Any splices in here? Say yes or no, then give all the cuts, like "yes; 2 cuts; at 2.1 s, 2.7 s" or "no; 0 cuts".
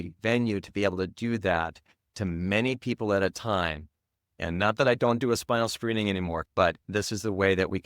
yes; 1 cut; at 6.4 s